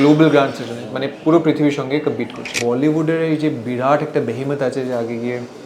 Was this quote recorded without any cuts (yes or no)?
no